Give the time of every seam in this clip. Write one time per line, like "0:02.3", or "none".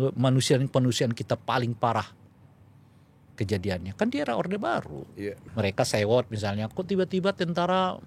0:05.4